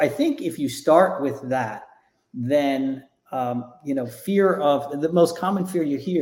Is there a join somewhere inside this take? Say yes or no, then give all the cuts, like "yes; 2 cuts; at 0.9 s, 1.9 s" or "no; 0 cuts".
no; 0 cuts